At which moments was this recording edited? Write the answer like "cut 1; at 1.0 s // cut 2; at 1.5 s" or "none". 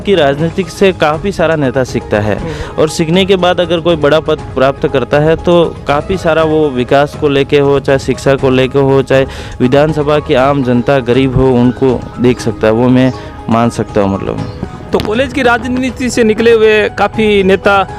none